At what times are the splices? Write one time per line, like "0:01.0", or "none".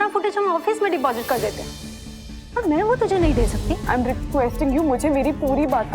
0:03.7

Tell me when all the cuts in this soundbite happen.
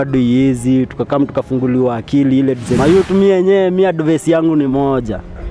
0:02.7

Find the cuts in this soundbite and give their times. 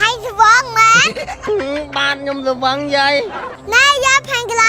0:03.5

